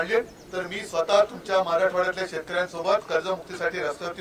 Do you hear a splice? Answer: no; 0 cuts

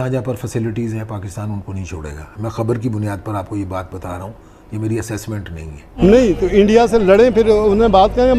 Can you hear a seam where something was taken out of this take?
yes; 1 cut; at 5.8 s

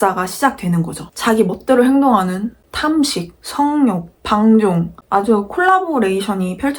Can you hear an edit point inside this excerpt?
yes; 1 cut; at 1.0 s

